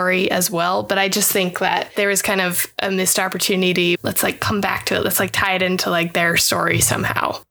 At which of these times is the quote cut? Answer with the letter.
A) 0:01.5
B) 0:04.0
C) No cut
B